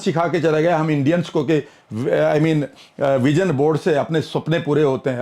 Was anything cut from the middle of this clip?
no; 0 cuts

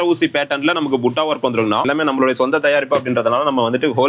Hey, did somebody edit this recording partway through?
yes; 1 cut; at 1.9 s

